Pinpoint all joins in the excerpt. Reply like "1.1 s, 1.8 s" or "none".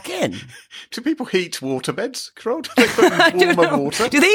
0.9 s